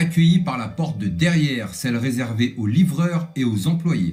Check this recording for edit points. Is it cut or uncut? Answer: uncut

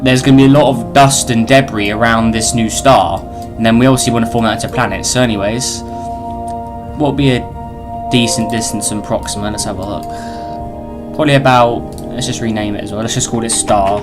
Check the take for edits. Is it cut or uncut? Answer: cut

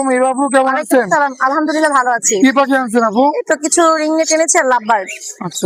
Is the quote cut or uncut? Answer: uncut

